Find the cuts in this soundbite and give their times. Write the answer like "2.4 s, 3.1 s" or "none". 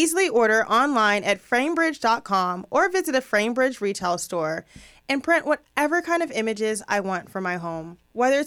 none